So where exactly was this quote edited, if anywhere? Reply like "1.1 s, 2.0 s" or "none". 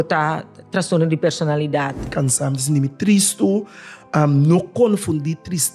2.1 s